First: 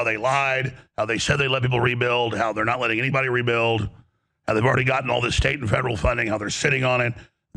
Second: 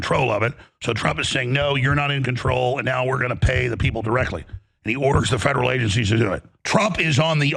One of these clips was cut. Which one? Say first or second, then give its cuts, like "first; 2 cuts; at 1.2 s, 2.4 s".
second; 1 cut; at 6.5 s